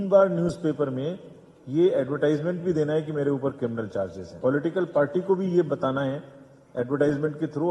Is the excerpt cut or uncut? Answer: cut